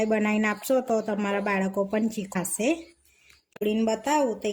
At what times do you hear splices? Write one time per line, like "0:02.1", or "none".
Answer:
0:02.3
0:03.6